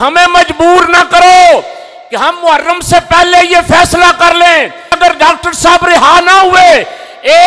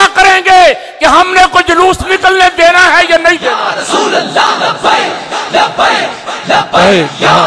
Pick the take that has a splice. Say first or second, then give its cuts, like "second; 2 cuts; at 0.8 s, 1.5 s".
first; 1 cut; at 5.0 s